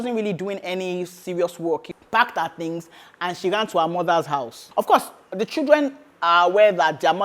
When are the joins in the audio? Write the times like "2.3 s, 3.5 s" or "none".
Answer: 1.9 s, 4.6 s